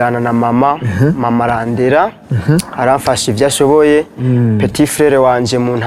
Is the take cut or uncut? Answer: uncut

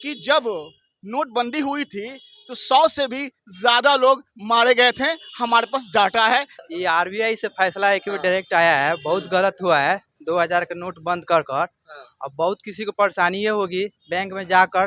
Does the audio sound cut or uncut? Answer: cut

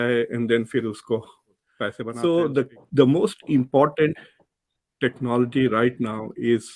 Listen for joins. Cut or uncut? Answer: cut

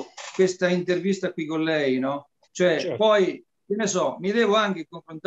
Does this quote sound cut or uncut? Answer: uncut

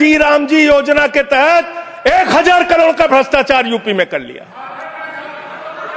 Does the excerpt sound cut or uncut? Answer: uncut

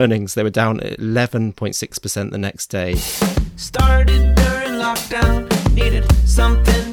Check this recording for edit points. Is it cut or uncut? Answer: cut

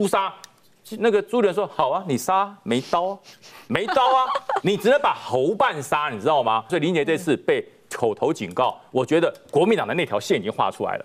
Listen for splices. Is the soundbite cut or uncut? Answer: cut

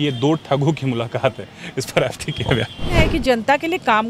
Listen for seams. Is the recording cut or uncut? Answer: cut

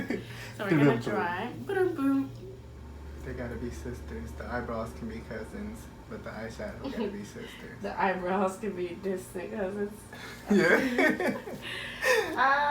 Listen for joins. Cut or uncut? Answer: cut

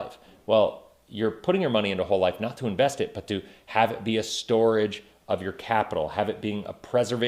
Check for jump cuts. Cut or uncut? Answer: uncut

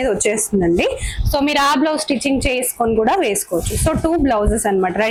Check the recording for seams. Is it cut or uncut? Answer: uncut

